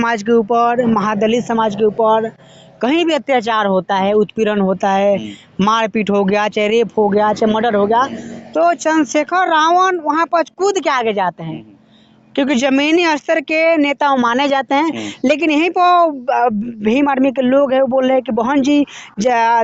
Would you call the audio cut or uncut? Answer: uncut